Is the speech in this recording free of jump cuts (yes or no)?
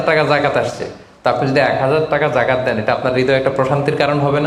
yes